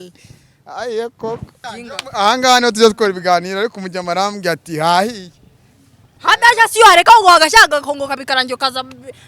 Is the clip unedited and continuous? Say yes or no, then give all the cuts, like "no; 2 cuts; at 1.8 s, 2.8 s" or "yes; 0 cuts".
no; 1 cut; at 1.6 s